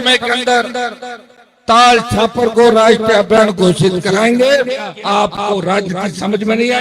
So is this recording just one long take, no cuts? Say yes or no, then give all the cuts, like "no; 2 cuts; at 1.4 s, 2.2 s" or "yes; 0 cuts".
no; 1 cut; at 4.9 s